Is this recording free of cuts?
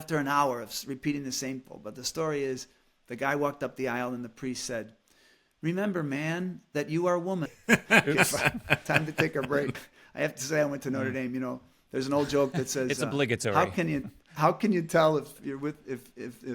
no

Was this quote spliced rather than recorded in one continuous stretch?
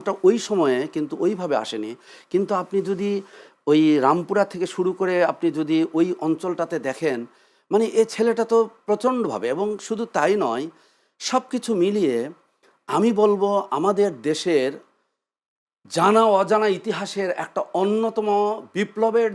no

